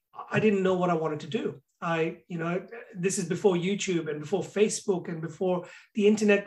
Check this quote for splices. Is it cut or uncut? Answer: uncut